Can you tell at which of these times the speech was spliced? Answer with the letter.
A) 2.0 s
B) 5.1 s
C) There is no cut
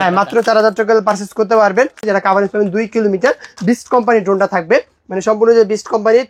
A